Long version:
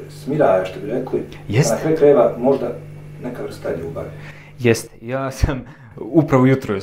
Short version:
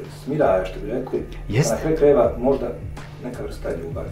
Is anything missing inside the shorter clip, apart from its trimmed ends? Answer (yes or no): no